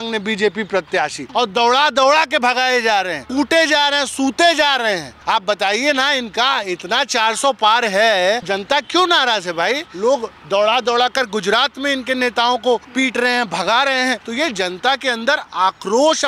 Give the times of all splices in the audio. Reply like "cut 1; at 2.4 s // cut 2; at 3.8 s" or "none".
cut 1; at 1.2 s // cut 2; at 3.2 s // cut 3; at 5.1 s // cut 4; at 8.5 s // cut 5; at 9.9 s // cut 6; at 12.9 s // cut 7; at 14.3 s